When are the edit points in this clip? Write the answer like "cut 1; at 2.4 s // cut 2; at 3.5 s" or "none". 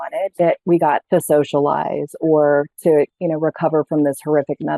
cut 1; at 1.0 s